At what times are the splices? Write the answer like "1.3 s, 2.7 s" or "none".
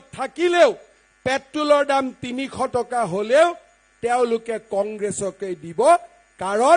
none